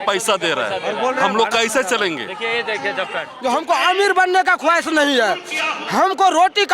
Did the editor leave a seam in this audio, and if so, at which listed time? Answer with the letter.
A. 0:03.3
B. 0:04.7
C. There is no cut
A